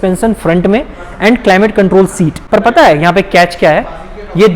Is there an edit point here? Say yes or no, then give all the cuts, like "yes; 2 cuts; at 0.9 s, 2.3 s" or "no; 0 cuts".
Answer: yes; 1 cut; at 2.3 s